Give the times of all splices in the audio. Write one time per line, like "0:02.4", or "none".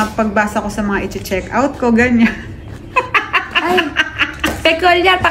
none